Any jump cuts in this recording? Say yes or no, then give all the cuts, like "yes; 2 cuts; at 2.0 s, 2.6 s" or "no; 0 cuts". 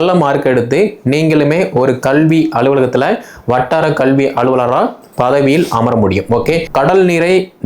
yes; 1 cut; at 6.7 s